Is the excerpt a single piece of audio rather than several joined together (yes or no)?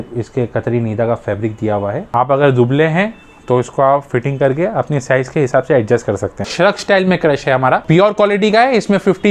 no